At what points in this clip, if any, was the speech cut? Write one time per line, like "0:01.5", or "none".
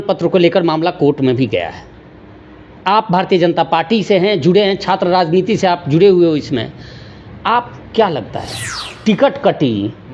0:08.6